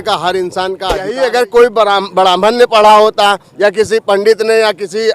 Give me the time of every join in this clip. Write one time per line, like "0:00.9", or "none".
0:01.1